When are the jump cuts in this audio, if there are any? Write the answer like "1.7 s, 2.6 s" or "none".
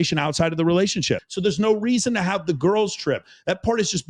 1.3 s